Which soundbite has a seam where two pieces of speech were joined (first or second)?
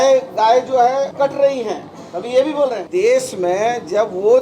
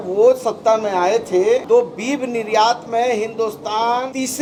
first